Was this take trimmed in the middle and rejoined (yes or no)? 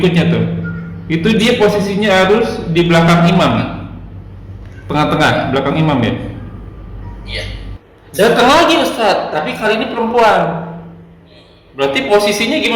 yes